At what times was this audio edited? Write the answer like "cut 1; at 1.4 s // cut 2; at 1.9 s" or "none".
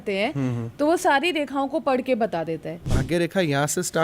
cut 1; at 2.9 s

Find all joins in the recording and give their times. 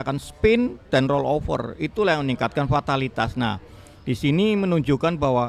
none

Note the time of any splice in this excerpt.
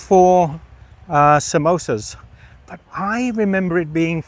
none

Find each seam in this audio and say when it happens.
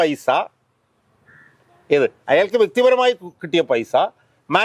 none

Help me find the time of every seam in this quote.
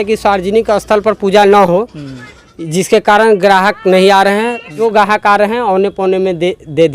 cut 1; at 4.7 s

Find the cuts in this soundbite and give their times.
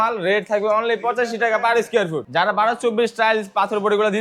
cut 1; at 2.2 s

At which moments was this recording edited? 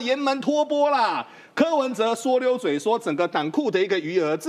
none

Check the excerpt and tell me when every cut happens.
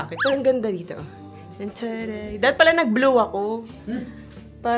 none

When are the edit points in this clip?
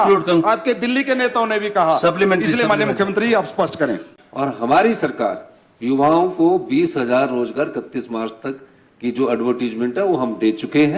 cut 1; at 4.1 s

